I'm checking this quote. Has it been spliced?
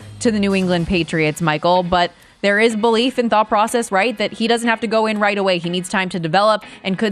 no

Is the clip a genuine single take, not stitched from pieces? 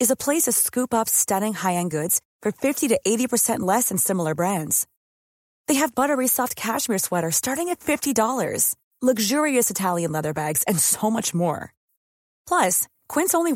yes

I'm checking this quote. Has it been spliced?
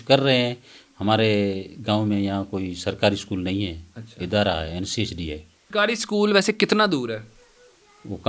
yes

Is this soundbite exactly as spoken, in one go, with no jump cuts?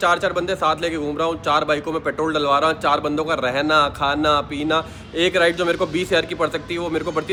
yes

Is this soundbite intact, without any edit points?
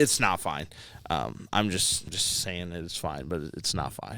no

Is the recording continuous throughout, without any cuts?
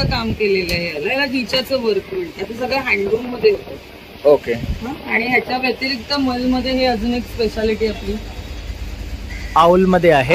yes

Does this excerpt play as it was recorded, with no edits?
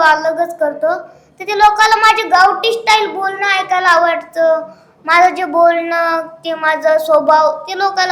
yes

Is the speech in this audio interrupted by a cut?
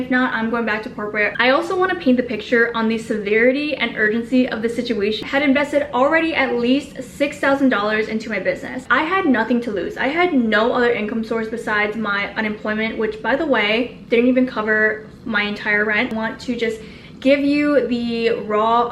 yes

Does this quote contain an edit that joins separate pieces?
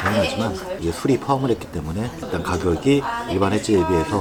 no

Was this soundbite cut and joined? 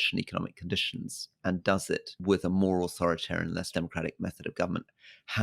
yes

